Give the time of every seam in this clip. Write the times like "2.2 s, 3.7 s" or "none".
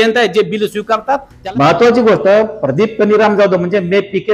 1.3 s